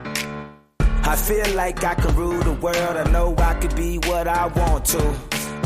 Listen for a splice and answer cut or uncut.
uncut